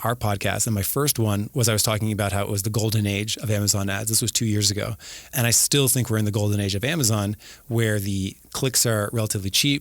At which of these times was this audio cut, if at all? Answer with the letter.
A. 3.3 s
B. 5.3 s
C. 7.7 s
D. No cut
B